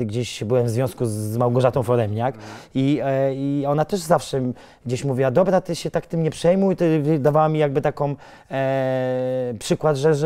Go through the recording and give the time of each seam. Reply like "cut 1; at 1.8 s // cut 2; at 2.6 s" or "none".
none